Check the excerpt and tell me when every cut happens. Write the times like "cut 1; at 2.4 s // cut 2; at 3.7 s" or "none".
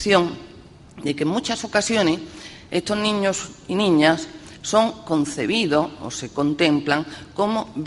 none